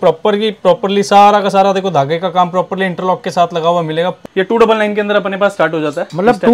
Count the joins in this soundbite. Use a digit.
1